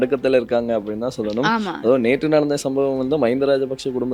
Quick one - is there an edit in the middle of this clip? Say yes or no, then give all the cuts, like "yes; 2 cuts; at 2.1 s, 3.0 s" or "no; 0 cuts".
no; 0 cuts